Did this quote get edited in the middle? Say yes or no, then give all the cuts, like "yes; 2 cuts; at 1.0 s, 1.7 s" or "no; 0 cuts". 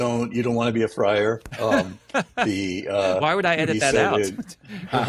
no; 0 cuts